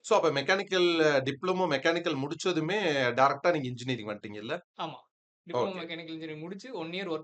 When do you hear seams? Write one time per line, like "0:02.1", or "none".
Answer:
none